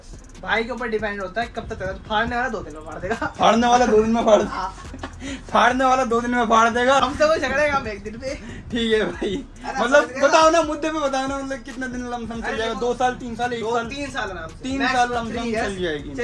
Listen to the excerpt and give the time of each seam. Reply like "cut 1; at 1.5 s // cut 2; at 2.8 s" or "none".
none